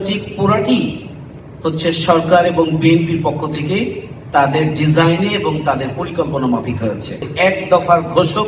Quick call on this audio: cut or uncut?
cut